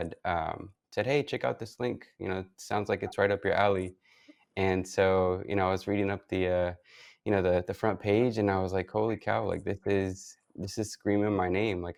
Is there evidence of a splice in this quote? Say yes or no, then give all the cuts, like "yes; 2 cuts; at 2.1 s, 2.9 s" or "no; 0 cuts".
no; 0 cuts